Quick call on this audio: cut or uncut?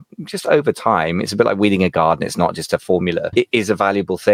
cut